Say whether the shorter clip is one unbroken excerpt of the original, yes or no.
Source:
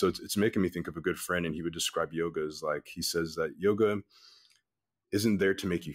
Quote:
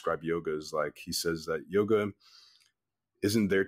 yes